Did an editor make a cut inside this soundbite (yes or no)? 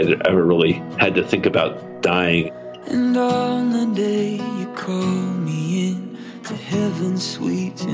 yes